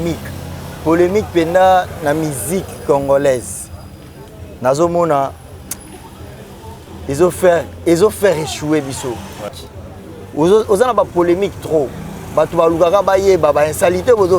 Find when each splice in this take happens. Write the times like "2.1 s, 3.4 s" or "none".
9.5 s